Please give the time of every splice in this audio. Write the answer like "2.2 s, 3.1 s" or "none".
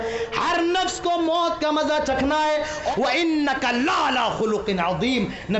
2.9 s